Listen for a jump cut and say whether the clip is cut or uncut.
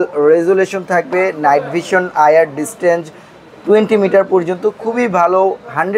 uncut